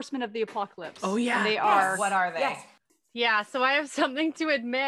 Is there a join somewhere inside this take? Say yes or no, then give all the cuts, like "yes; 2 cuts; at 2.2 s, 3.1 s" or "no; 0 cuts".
yes; 1 cut; at 2.8 s